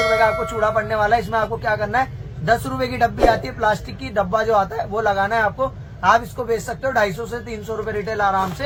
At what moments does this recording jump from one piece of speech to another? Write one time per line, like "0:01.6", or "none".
none